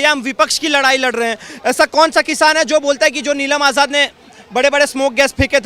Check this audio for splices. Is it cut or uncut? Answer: uncut